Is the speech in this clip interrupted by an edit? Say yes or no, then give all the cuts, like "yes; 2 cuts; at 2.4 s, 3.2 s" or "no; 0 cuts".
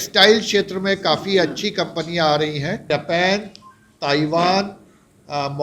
yes; 1 cut; at 2.9 s